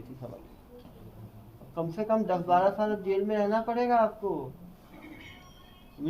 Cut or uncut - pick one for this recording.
cut